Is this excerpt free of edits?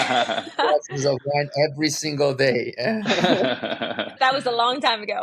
no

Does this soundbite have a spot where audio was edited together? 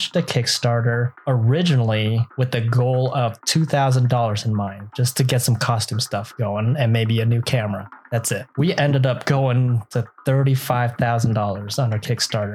yes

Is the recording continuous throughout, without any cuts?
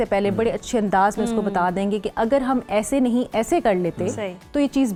yes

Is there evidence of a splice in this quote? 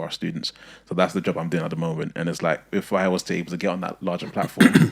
no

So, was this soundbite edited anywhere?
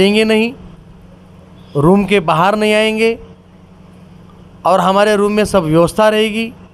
no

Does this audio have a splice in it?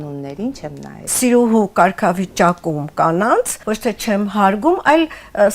yes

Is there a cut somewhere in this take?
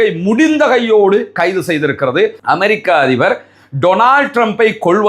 yes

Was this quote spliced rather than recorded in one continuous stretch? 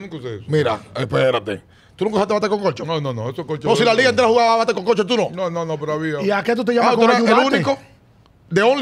no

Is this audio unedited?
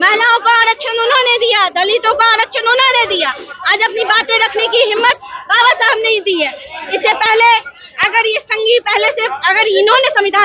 yes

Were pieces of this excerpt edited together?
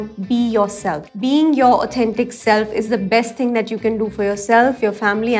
yes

